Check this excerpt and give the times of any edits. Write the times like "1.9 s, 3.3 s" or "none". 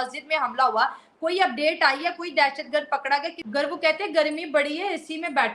3.4 s